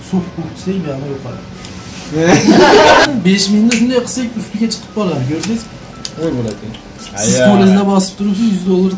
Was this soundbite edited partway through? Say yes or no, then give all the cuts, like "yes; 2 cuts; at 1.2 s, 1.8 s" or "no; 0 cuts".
yes; 1 cut; at 3.1 s